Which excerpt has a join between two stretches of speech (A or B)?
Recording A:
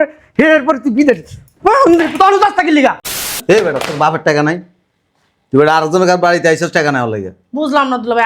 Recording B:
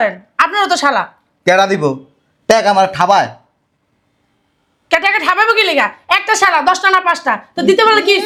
A